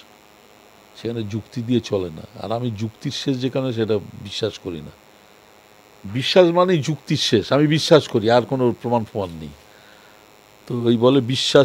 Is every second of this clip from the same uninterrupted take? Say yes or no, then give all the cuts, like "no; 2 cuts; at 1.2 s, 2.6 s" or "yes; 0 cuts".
yes; 0 cuts